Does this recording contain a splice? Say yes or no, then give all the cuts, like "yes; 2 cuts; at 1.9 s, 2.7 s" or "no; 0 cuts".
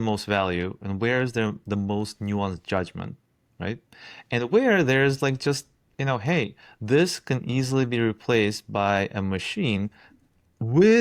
no; 0 cuts